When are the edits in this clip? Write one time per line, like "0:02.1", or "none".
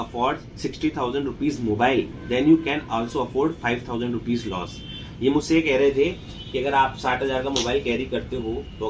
none